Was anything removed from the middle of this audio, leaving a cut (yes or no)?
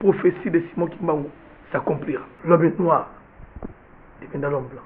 yes